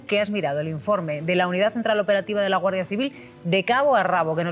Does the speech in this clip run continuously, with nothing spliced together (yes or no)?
yes